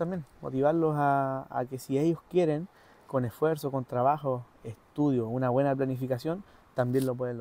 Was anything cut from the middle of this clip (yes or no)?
no